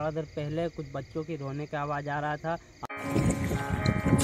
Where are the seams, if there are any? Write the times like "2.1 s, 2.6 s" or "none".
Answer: 2.7 s

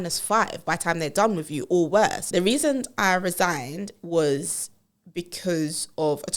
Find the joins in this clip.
2.2 s

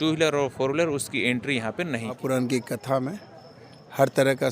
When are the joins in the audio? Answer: 2.2 s

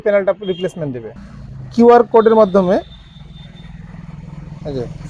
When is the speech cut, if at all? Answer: 1.3 s

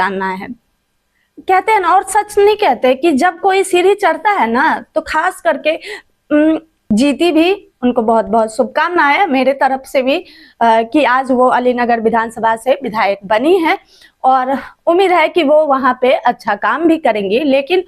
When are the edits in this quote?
6.7 s

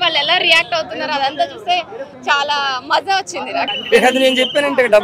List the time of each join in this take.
3.7 s

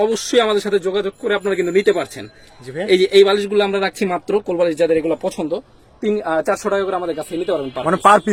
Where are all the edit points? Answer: none

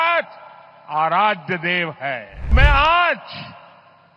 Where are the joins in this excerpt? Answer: 2.5 s

